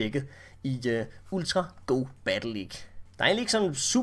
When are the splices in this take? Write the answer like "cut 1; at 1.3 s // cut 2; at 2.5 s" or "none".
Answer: none